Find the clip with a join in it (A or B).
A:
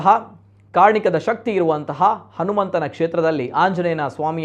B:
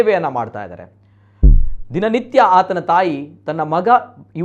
B